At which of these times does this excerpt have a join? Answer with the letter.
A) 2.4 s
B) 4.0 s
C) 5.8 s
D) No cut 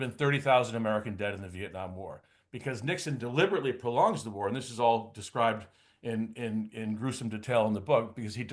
D